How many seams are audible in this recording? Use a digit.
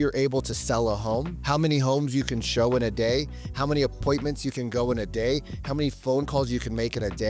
1